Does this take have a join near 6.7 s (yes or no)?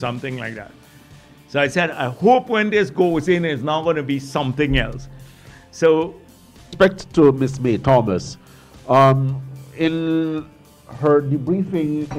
yes